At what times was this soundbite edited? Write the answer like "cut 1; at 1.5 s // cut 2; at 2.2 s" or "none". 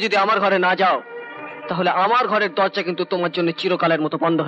none